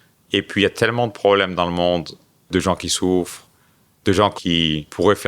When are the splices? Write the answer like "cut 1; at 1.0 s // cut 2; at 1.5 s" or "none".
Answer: cut 1; at 2.5 s // cut 2; at 4.3 s